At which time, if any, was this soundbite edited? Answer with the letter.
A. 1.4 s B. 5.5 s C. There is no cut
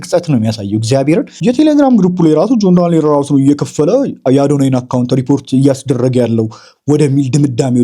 A